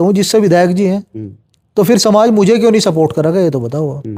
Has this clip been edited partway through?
no; 0 cuts

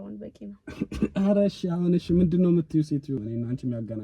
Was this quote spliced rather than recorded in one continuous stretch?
yes; 1 cut; at 3.1 s

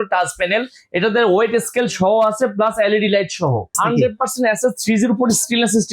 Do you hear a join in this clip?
yes; 1 cut; at 3.8 s

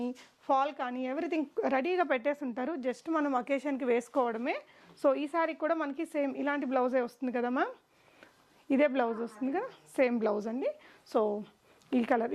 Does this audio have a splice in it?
no; 0 cuts

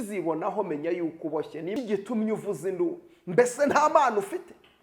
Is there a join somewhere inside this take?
yes; 1 cut; at 1.7 s

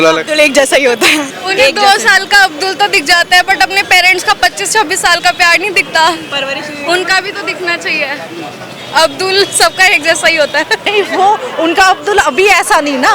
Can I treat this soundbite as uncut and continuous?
no; 2 cuts; at 1.4 s, 10.9 s

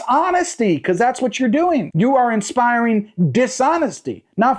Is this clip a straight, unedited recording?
no; 1 cut; at 1.9 s

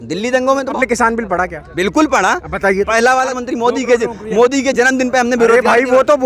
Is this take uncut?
no; 2 cuts; at 0.7 s, 3.3 s

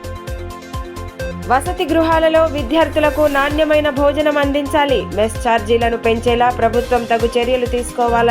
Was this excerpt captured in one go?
no; 1 cut; at 1.2 s

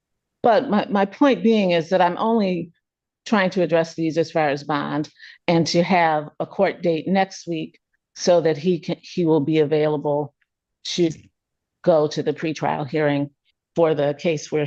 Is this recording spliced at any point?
no; 0 cuts

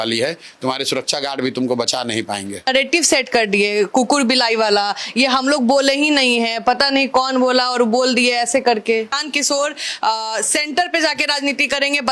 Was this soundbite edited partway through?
yes; 2 cuts; at 2.7 s, 9.2 s

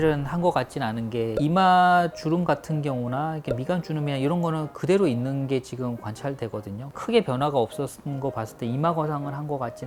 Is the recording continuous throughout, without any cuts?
yes; 0 cuts

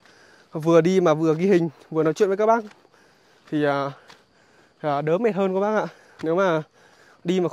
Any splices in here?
no; 0 cuts

